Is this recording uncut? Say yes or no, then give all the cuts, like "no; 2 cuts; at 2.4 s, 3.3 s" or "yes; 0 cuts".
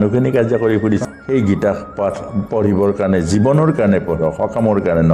no; 1 cut; at 1.0 s